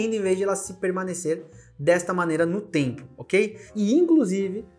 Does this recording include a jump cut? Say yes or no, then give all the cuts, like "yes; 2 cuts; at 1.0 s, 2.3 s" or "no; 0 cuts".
no; 0 cuts